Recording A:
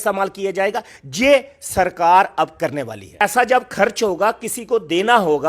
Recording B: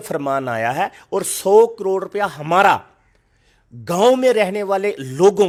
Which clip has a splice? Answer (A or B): A